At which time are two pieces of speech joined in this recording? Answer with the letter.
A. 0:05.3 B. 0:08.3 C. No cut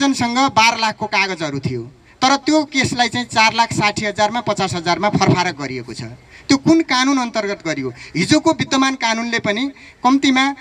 C